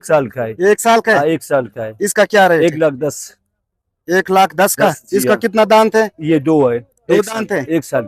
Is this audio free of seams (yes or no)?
yes